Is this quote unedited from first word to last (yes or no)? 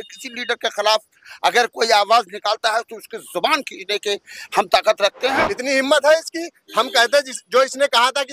no